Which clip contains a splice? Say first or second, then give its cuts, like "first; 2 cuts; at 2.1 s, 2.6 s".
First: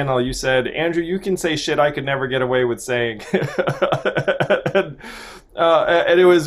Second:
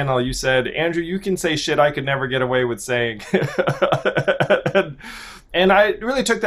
second; 1 cut; at 5.5 s